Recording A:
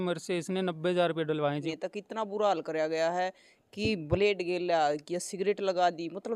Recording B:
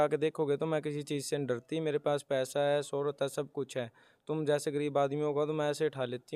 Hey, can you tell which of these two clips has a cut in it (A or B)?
A